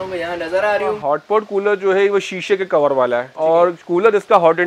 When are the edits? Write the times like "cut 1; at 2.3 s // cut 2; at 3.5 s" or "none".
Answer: cut 1; at 1.0 s // cut 2; at 3.3 s